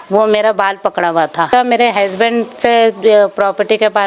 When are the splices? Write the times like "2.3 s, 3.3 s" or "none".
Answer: 1.5 s